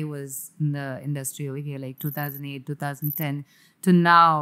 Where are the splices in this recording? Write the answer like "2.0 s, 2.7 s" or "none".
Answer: none